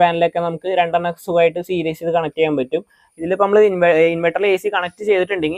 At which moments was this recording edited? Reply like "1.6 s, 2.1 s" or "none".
3.0 s

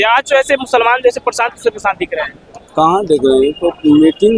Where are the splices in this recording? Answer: none

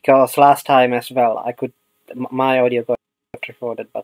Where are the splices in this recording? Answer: none

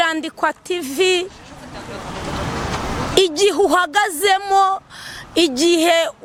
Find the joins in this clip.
none

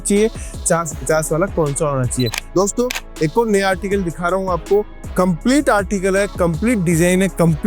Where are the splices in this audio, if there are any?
2.4 s

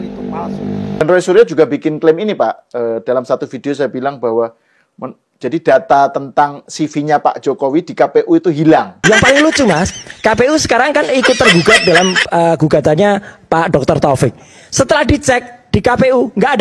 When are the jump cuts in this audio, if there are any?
1.0 s

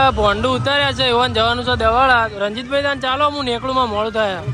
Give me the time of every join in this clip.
none

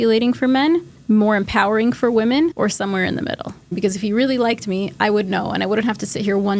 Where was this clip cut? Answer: 0.9 s, 2.5 s, 3.8 s

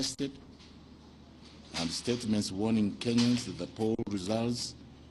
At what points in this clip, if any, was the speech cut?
none

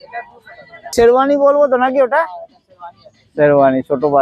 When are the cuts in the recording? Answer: 0.9 s

